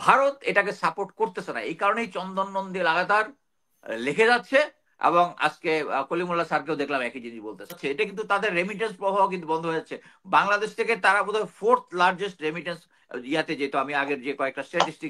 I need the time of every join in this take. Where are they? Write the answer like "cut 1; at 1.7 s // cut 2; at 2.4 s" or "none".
cut 1; at 7.8 s